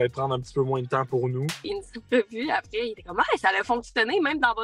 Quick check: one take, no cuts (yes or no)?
no